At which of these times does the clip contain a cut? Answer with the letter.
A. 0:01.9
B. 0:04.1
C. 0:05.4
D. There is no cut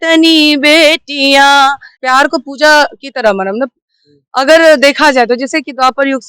A